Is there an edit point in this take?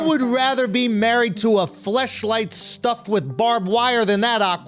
no; 0 cuts

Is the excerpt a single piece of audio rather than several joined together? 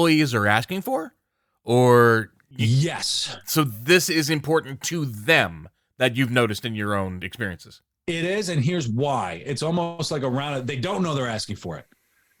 yes; 0 cuts

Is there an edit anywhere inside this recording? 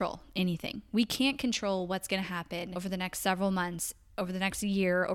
yes; 1 cut; at 2.7 s

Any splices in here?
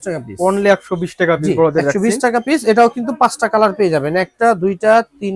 no; 0 cuts

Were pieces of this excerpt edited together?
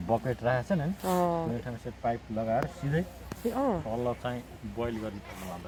no; 0 cuts

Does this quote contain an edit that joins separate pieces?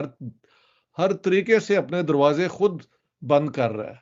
no; 0 cuts

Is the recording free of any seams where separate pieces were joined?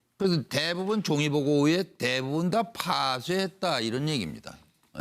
no; 1 cut; at 2.0 s

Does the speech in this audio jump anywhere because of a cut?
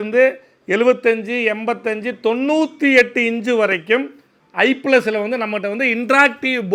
no; 0 cuts

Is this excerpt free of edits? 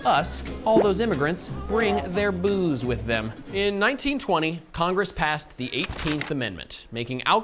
no; 1 cut; at 3.4 s

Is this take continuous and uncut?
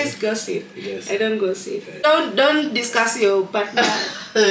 no; 1 cut; at 2.0 s

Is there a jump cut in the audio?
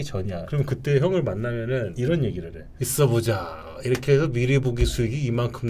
no; 0 cuts

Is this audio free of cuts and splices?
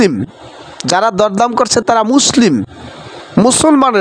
yes; 0 cuts

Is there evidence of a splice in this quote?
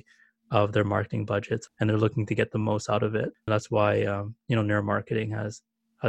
yes; 2 cuts; at 1.7 s, 3.5 s

